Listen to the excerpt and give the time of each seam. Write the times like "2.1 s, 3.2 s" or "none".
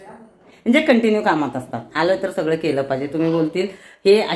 none